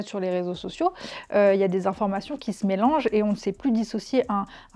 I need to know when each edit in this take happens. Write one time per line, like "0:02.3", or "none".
none

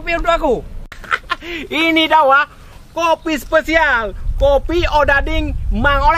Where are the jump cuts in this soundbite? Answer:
0:00.9

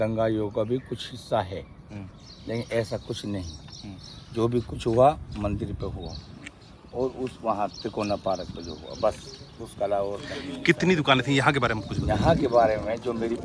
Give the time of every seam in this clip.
none

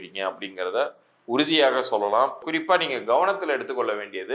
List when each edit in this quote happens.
0:02.5

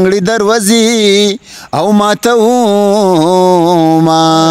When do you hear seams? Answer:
none

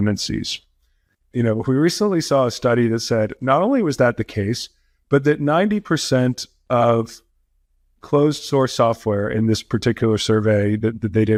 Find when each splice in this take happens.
none

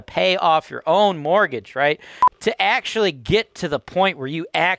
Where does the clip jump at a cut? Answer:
0:02.2

